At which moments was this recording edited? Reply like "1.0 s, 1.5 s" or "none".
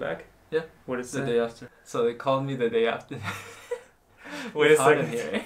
1.7 s